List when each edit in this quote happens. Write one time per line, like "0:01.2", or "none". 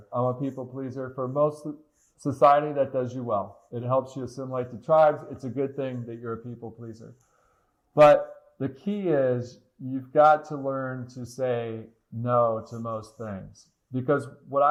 none